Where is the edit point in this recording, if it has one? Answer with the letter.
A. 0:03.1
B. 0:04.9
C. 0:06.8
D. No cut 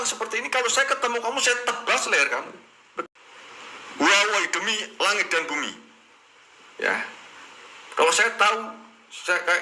A